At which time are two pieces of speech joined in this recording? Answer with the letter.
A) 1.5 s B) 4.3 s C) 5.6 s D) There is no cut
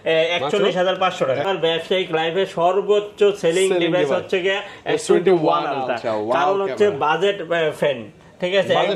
A